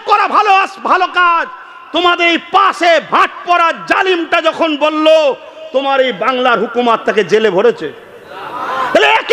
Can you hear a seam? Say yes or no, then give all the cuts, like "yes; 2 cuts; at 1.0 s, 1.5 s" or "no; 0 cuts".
no; 0 cuts